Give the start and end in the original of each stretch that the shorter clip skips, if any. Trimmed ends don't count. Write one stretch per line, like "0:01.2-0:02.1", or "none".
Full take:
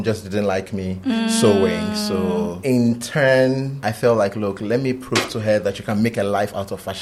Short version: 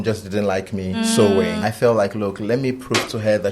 0:01.0-0:01.2
0:01.9-0:03.8